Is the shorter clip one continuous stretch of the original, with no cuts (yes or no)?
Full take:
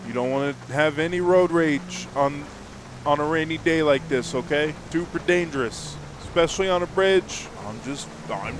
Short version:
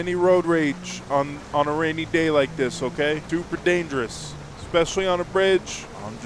no